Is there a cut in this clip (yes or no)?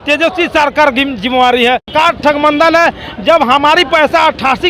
yes